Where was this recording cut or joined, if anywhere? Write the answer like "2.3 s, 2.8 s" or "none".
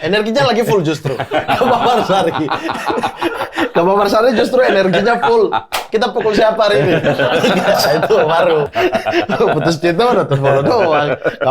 8.7 s